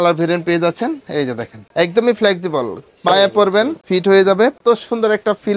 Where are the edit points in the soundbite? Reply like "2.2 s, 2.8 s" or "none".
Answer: 1.6 s, 3.8 s, 4.6 s

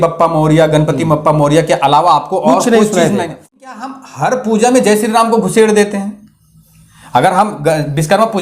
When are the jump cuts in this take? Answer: 3.9 s

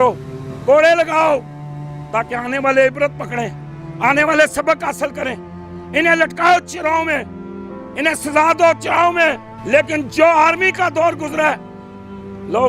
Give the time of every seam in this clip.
9.5 s

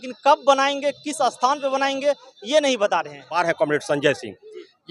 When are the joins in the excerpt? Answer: 3.4 s

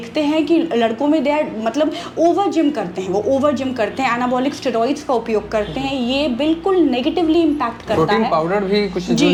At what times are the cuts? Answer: none

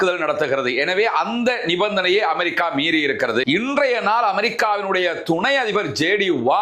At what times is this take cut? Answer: 3.4 s

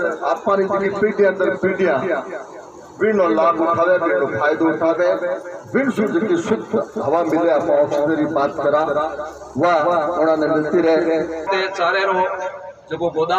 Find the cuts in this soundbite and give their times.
11.5 s

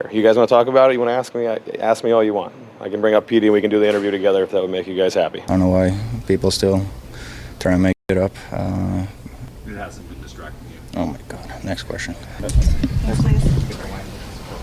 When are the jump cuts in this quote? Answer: 5.4 s, 9.5 s, 12.4 s

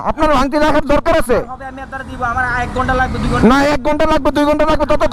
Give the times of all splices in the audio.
none

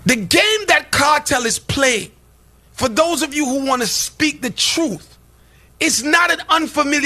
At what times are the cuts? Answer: none

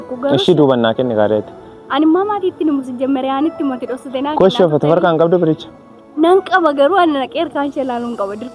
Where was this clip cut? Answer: none

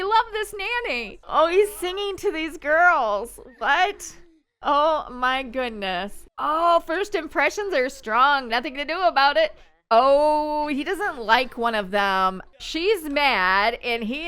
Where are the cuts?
1.1 s, 6.2 s, 12.5 s

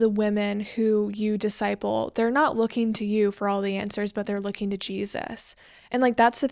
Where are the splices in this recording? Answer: none

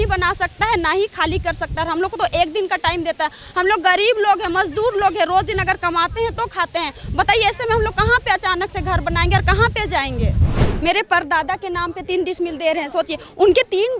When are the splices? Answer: 10.7 s

